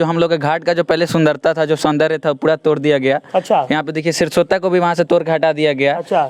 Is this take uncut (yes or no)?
yes